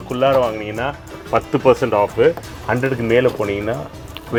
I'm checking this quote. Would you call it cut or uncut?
uncut